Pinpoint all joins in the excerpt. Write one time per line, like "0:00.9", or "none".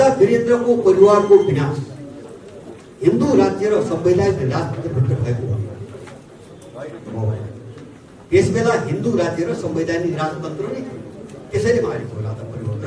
none

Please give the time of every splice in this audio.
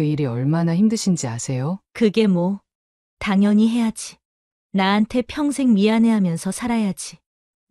0:01.8

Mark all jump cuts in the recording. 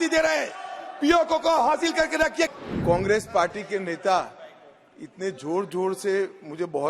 0:02.5

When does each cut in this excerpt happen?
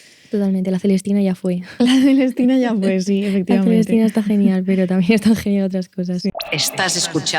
0:06.3

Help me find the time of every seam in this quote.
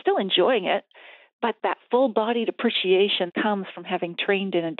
0:01.5
0:03.3

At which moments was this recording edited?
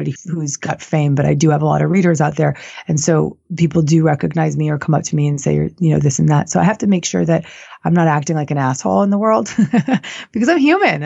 none

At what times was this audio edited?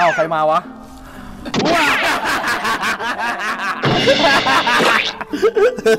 0:03.8

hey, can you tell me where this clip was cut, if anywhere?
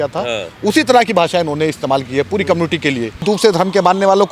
0:03.2

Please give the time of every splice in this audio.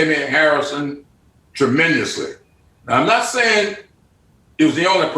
0:02.5

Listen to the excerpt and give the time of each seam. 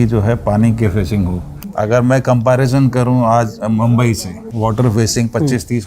0:01.6
0:04.4

